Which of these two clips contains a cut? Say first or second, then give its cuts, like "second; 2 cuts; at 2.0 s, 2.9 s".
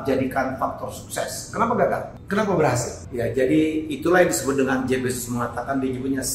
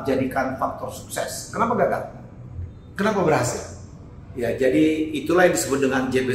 first; 2 cuts; at 2.1 s, 3.0 s